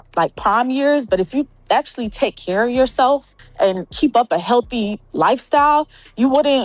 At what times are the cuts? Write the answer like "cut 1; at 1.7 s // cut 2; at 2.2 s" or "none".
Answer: cut 1; at 3.4 s

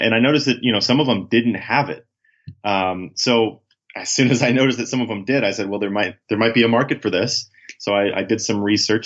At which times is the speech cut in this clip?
cut 1; at 6.2 s

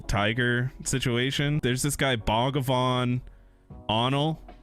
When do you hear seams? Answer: cut 1; at 1.6 s

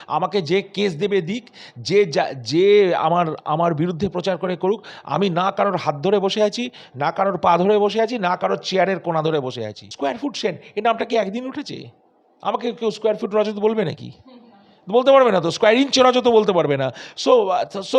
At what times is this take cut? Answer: cut 1; at 9.9 s

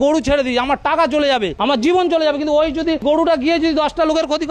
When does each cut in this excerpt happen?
cut 1; at 1.5 s // cut 2; at 3.0 s

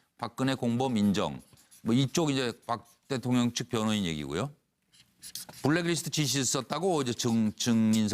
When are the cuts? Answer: cut 1; at 1.5 s

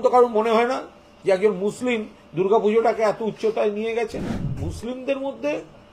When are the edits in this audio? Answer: cut 1; at 4.4 s

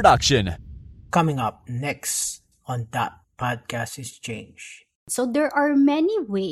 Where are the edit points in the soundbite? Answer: cut 1; at 4.9 s

